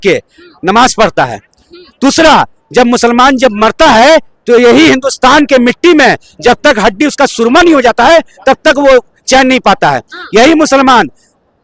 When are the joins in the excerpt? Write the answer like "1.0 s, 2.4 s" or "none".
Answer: none